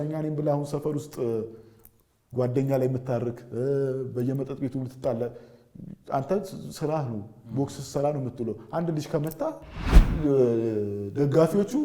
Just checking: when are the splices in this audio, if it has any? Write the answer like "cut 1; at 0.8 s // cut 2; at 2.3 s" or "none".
cut 1; at 10.0 s